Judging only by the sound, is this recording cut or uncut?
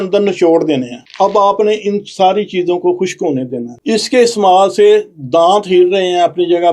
cut